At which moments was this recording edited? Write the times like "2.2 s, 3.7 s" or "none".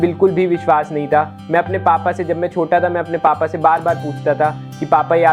none